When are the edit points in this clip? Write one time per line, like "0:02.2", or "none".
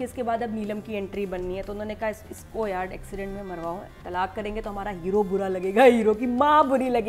none

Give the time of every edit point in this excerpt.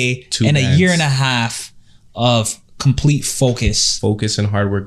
0:03.9

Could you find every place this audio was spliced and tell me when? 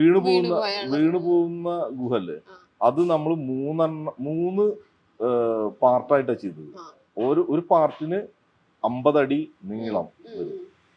none

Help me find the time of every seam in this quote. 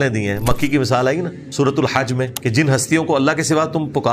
0:01.4
0:02.3

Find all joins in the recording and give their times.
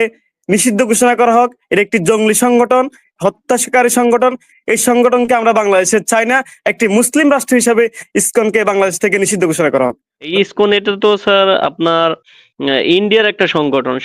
0:10.1

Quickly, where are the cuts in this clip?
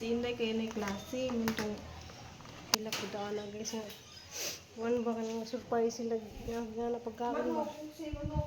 0:02.8

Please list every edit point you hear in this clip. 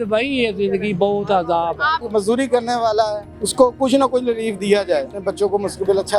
0:02.1
0:05.1

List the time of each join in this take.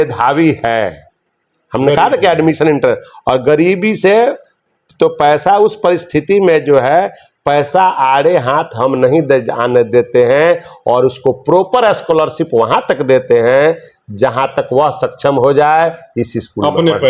none

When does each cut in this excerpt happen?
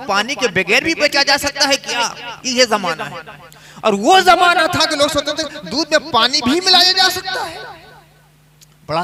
none

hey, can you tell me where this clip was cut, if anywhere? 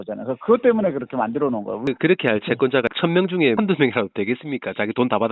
0:01.9
0:03.4

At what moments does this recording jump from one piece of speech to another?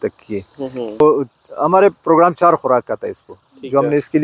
0:01.0

